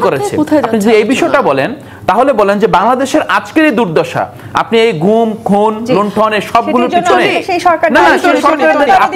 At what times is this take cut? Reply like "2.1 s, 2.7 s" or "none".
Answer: none